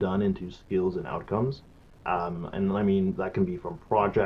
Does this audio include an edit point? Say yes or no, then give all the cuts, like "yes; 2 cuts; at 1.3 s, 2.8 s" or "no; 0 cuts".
no; 0 cuts